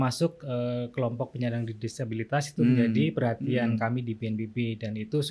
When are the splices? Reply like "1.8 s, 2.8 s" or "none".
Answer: none

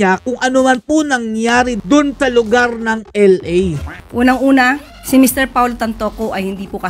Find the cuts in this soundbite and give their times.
4.0 s, 4.9 s

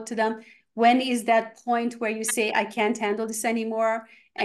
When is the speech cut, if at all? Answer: none

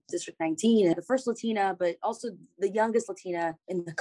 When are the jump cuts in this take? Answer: 0.9 s

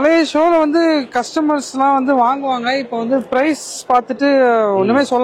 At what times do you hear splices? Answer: none

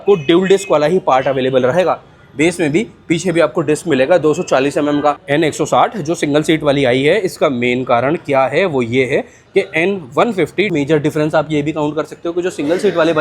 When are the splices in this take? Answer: 5.2 s, 10.7 s

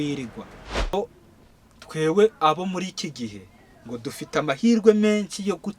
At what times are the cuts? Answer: 0.9 s

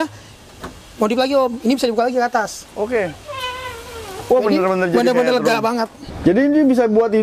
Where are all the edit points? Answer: 6.1 s

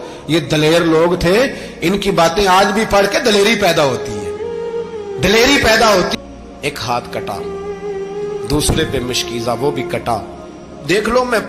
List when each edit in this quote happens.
6.1 s

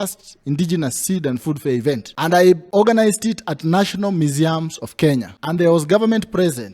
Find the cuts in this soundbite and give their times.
2.5 s, 5.4 s

